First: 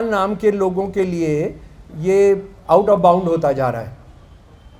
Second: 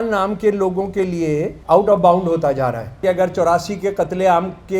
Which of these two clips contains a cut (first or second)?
second